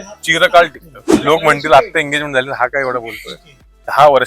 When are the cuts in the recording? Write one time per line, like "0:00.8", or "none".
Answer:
0:01.2